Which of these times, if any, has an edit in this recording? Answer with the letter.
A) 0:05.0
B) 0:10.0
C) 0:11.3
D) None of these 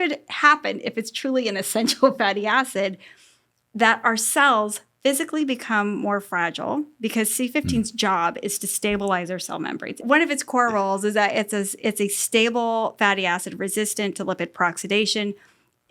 B